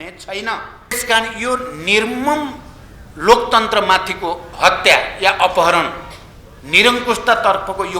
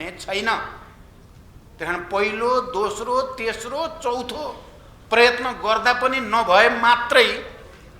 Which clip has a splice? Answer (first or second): first